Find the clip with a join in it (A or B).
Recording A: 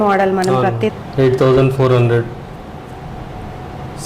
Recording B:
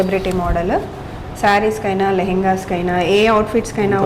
A